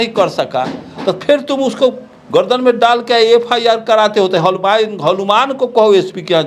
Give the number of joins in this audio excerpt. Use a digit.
0